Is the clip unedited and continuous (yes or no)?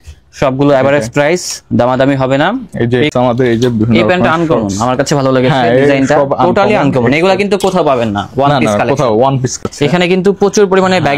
no